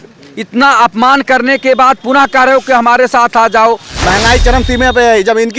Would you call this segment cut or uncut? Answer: cut